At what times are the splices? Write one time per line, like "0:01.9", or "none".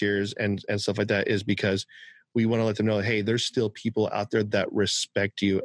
none